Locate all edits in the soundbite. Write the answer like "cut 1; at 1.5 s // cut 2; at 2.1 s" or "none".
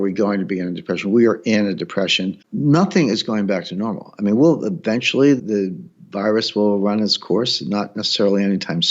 cut 1; at 2.4 s // cut 2; at 5.4 s